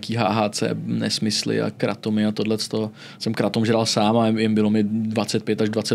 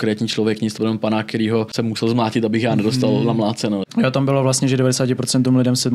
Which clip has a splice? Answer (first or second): second